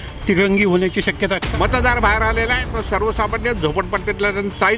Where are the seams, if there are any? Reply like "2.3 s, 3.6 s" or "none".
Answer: 1.4 s